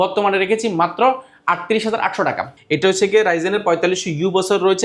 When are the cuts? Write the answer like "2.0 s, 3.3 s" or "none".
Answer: 2.5 s